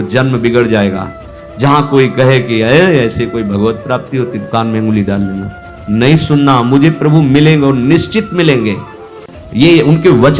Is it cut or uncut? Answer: uncut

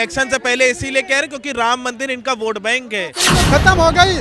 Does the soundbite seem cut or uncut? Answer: cut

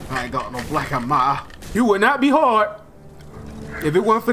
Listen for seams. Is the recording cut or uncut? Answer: cut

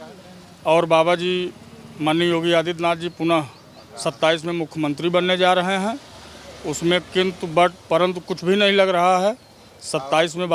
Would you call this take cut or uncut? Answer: uncut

